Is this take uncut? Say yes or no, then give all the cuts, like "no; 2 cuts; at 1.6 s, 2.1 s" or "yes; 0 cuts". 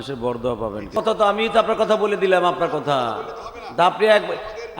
no; 1 cut; at 1.0 s